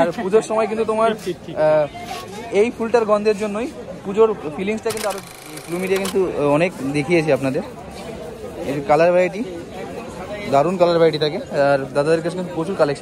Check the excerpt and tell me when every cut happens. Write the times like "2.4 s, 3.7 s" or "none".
5.5 s